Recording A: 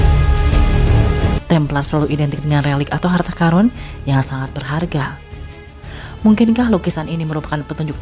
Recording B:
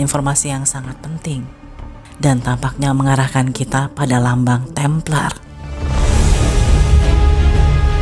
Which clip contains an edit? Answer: A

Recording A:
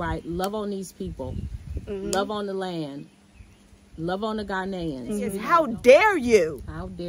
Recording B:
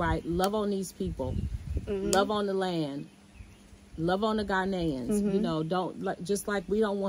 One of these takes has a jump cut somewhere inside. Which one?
A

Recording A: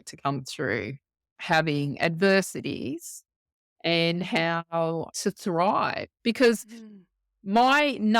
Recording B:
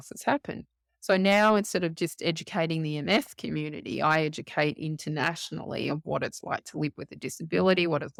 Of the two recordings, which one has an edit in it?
A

